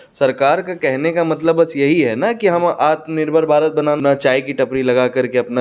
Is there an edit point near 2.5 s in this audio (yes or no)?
no